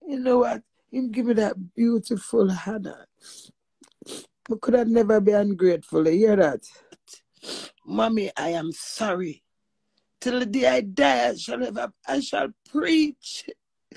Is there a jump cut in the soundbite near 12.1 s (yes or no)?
no